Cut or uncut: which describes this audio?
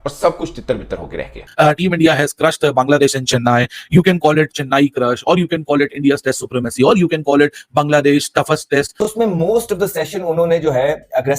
cut